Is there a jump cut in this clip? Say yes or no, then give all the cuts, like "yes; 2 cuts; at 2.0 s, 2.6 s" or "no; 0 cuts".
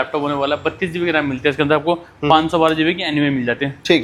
no; 0 cuts